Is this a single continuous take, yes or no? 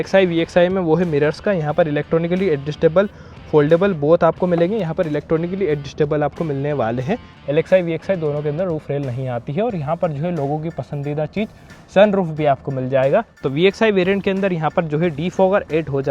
no